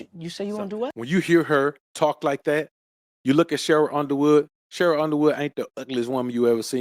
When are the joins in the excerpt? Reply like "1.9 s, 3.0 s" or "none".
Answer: 1.0 s